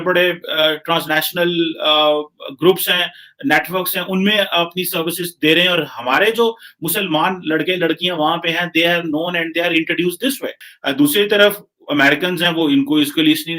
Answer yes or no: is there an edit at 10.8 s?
yes